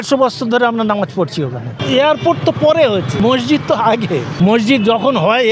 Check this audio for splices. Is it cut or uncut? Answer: cut